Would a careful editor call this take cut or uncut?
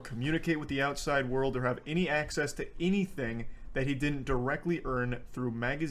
uncut